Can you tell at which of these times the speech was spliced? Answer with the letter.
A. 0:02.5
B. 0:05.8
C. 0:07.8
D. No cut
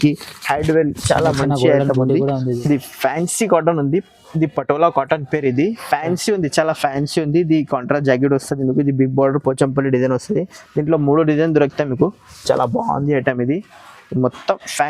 A